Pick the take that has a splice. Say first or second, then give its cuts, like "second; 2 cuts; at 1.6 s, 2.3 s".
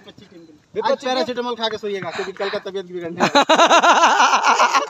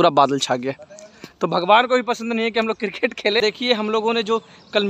second; 1 cut; at 3.4 s